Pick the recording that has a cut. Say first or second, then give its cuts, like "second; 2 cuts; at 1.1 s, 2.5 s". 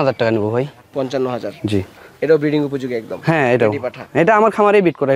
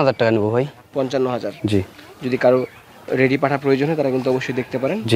first; 1 cut; at 2.0 s